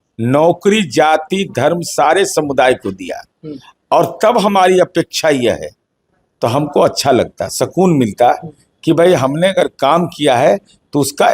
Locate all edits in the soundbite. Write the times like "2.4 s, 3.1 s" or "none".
none